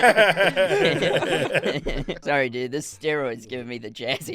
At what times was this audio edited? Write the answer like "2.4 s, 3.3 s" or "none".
2.2 s